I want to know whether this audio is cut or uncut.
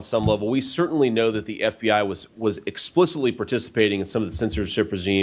uncut